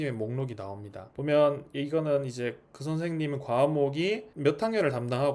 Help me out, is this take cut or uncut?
uncut